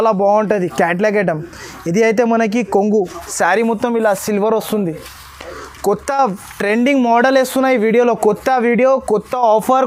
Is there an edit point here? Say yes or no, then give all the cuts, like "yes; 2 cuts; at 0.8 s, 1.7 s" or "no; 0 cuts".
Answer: no; 0 cuts